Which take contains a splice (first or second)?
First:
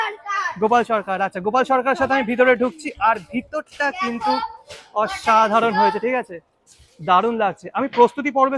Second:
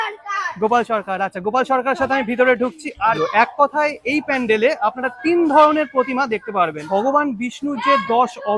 second